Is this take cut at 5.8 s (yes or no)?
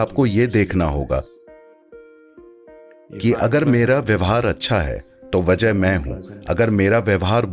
no